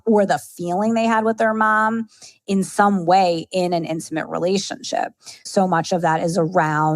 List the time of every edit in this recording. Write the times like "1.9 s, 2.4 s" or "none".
5.4 s